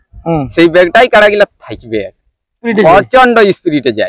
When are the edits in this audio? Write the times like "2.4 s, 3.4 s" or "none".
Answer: 2.6 s